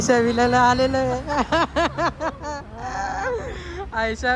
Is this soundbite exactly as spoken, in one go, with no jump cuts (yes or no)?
yes